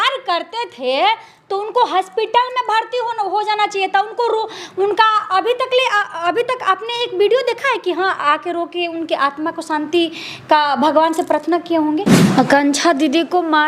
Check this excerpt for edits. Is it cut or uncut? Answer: cut